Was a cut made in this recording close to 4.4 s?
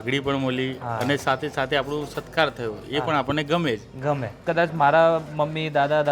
yes; 1 cut; at 4.4 s

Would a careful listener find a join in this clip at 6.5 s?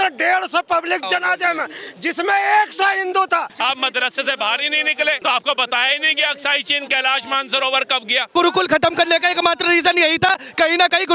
no; 4 cuts; at 1.0 s, 3.5 s, 5.2 s, 8.3 s

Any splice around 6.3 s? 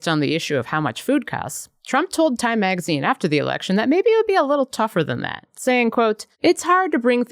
yes; 1 cut; at 6.3 s

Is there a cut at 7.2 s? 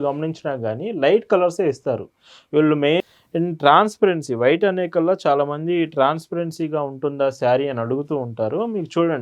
no; 1 cut; at 3.0 s

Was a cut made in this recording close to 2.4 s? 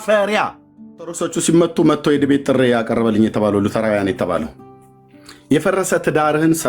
no; 1 cut; at 1.1 s

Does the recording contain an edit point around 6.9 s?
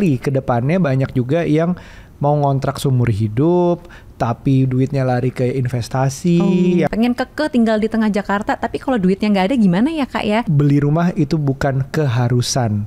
yes; 2 cuts; at 6.9 s, 10.5 s

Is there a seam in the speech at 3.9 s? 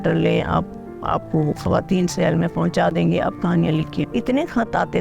yes; 1 cut; at 3.9 s

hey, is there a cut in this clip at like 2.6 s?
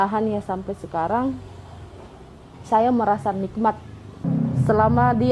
no; 1 cut; at 4.2 s

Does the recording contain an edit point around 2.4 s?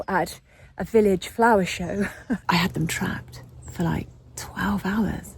yes; 1 cut; at 2.4 s

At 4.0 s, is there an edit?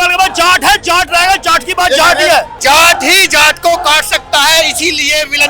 no; 1 cut; at 2.5 s

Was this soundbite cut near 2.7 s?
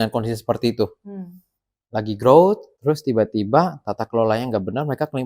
yes; 1 cut; at 2.7 s

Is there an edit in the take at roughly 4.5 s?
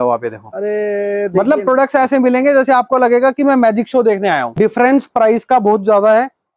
yes; 1 cut; at 4.5 s

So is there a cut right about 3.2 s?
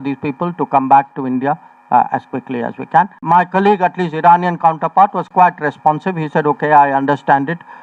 yes; 1 cut; at 3.2 s

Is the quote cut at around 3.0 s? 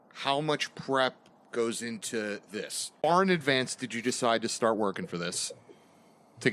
yes; 1 cut; at 3.0 s

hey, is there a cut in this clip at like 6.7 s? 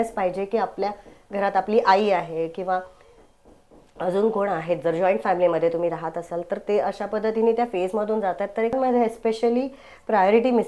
no; 1 cut; at 8.7 s

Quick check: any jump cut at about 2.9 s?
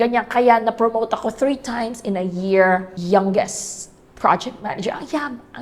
yes; 1 cut; at 2.9 s

